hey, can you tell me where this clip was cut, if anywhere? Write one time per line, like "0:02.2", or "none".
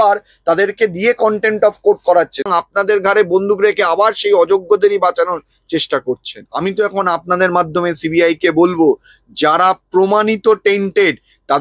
0:02.5
0:06.4